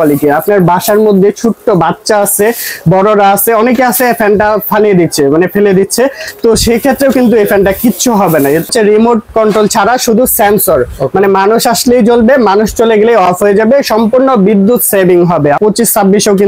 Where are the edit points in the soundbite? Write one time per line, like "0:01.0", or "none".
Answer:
0:08.7
0:15.6